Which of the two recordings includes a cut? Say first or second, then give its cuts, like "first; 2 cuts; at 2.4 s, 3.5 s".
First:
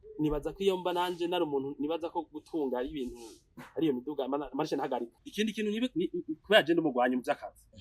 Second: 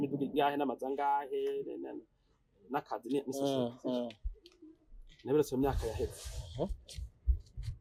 first; 1 cut; at 5.3 s